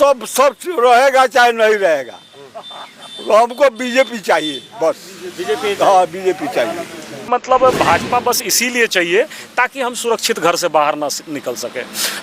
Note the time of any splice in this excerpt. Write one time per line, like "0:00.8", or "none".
0:07.3